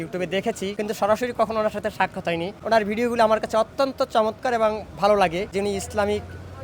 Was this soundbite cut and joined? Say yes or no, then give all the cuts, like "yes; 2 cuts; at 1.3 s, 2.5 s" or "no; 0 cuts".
yes; 3 cuts; at 0.7 s, 2.5 s, 5.5 s